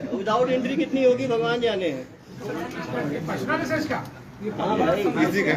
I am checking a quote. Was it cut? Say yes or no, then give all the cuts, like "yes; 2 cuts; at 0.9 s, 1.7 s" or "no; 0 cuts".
no; 0 cuts